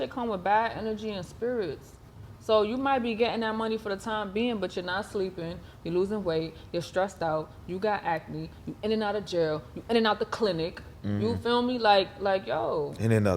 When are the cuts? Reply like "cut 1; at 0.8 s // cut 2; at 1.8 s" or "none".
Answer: none